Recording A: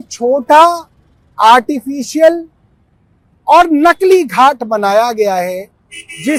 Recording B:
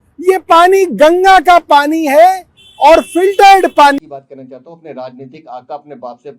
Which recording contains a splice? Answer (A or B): B